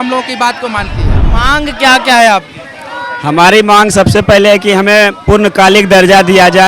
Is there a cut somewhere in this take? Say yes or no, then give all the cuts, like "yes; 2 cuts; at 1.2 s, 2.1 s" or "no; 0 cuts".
yes; 1 cut; at 1.2 s